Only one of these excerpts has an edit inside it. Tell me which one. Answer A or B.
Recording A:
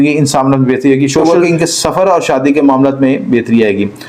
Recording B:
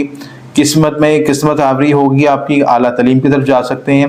A